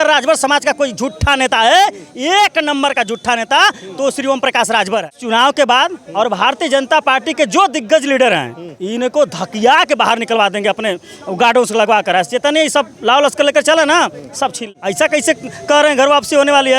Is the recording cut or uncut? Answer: cut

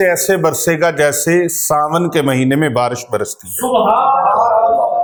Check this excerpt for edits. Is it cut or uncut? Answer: uncut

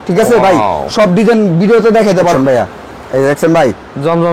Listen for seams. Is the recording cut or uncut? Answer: cut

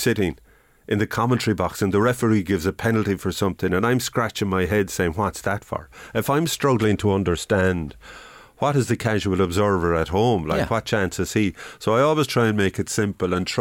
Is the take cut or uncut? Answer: uncut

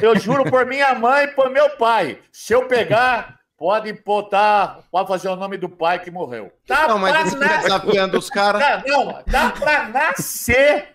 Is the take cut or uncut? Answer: cut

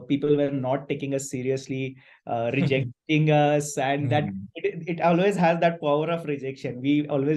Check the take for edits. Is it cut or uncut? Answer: uncut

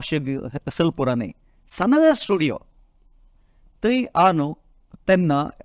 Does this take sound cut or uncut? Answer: uncut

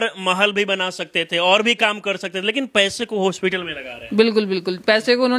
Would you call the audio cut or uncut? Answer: uncut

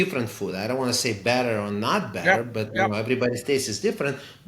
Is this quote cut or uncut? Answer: uncut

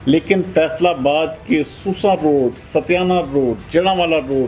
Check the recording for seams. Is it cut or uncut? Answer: uncut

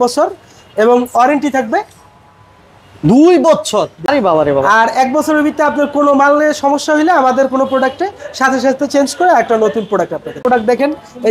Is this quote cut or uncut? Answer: cut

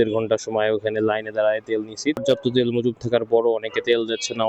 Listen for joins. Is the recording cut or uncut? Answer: cut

